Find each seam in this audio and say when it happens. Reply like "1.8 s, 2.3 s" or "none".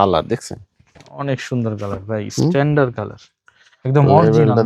none